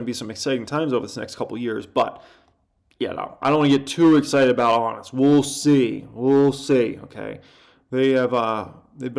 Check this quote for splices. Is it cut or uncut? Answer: uncut